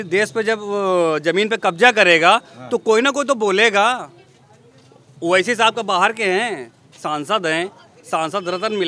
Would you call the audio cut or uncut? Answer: uncut